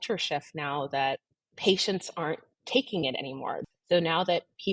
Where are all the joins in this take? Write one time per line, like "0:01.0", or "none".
0:03.6